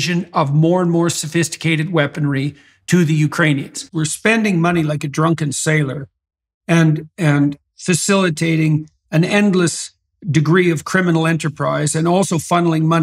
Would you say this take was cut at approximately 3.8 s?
yes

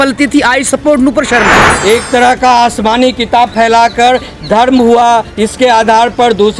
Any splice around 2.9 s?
no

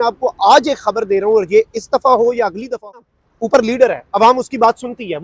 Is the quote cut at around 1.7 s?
no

